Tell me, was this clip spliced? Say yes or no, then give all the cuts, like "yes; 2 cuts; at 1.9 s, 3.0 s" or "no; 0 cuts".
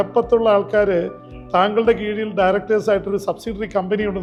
no; 0 cuts